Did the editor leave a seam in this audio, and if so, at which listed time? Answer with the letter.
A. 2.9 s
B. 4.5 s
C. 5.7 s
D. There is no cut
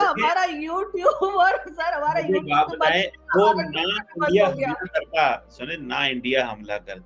D